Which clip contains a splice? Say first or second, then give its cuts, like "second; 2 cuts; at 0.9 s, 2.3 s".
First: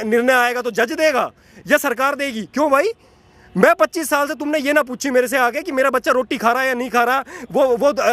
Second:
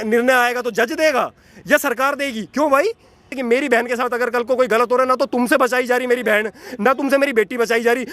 second; 1 cut; at 3.3 s